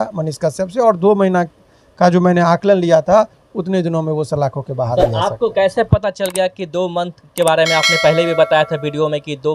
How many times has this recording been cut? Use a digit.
0